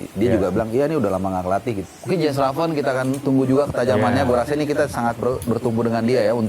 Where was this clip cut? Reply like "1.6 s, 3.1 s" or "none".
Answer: 1.8 s